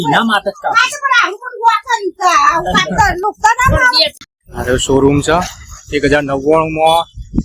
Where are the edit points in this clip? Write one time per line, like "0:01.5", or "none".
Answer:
0:04.2